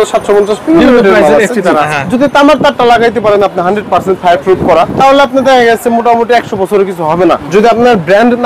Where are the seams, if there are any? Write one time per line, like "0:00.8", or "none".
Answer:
0:01.9
0:04.9
0:07.4